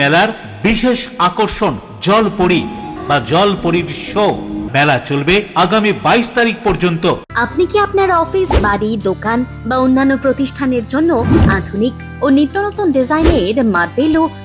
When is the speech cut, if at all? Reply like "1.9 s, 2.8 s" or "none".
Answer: 2.9 s, 4.6 s, 7.3 s